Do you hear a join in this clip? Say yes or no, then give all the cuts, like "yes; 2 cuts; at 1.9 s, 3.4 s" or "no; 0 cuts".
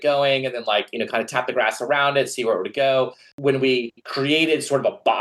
yes; 1 cut; at 3.2 s